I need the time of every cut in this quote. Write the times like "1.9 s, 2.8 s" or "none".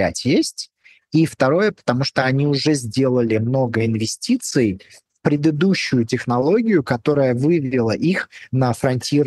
none